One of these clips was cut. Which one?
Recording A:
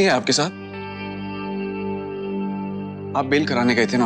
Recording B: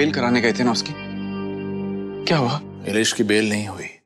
B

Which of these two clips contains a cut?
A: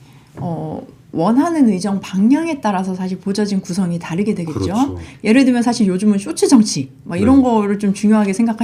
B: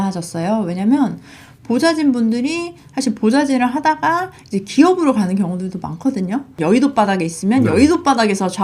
B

